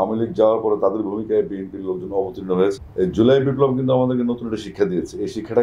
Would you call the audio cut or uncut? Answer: cut